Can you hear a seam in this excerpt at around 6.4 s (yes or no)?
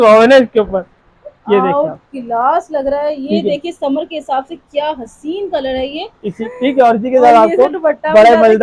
yes